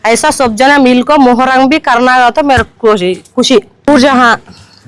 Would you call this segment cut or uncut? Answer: cut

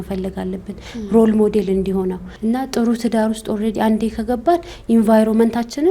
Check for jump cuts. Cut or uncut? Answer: cut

